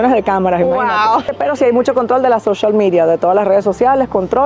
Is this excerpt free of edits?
no; 1 cut; at 1.3 s

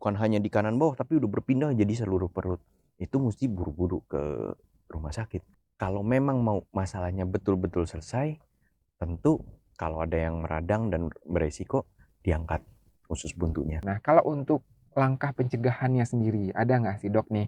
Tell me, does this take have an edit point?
yes; 2 cuts; at 5.6 s, 13.8 s

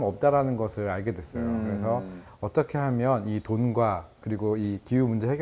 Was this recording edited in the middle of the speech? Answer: no; 0 cuts

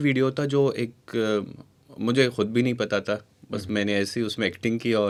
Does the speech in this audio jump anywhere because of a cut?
no; 0 cuts

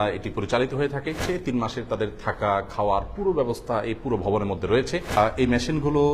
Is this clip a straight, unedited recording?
no; 2 cuts; at 1.2 s, 5.1 s

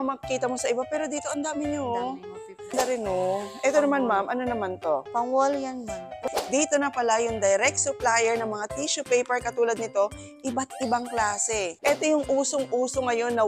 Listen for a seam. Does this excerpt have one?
yes; 3 cuts; at 2.7 s, 6.2 s, 11.7 s

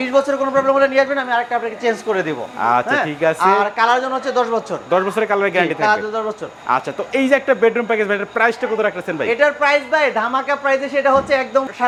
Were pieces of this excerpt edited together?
no; 0 cuts

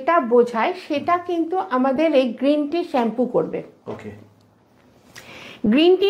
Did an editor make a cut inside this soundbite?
no; 0 cuts

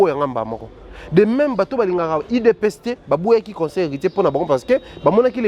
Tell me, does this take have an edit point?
no; 0 cuts

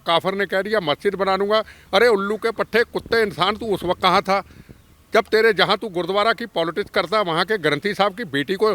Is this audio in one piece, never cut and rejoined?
yes; 0 cuts

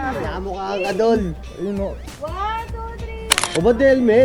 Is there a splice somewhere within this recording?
yes; 1 cut; at 3.3 s

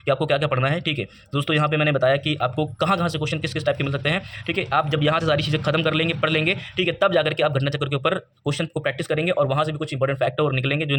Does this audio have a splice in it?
no; 0 cuts

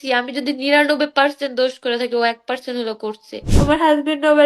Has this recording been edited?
yes; 1 cut; at 3.5 s

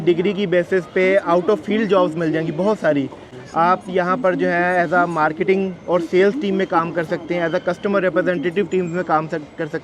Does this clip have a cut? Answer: no; 0 cuts

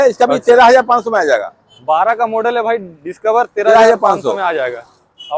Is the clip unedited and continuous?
yes; 0 cuts

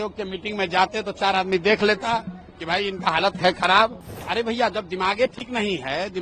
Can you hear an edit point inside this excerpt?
yes; 1 cut; at 4.2 s

